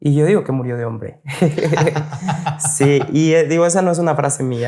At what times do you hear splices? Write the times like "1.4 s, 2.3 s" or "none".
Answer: none